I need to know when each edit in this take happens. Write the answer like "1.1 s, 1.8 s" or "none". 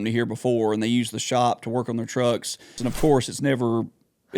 2.8 s